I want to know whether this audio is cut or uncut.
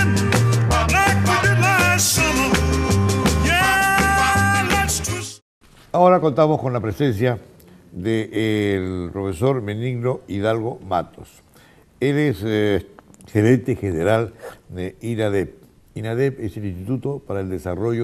uncut